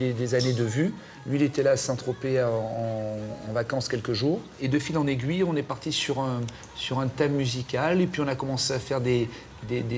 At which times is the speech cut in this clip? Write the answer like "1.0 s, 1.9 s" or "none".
1.1 s, 4.5 s

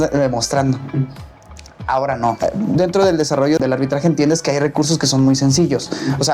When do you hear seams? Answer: 2.4 s

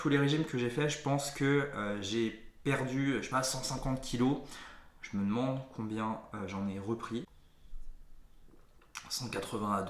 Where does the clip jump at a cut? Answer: 7.3 s

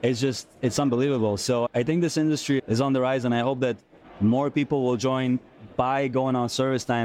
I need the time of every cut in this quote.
1.7 s, 2.6 s

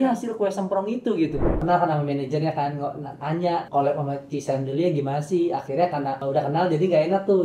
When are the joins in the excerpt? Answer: 1.6 s, 3.7 s, 6.2 s

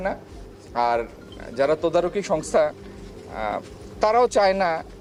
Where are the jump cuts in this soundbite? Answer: none

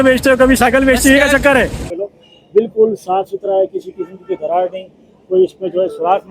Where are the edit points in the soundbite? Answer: 1.8 s

